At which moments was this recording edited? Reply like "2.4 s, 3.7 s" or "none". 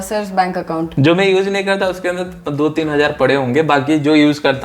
0.9 s